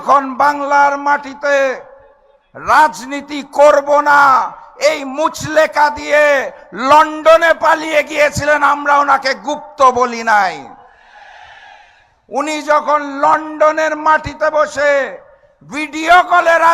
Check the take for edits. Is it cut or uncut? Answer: uncut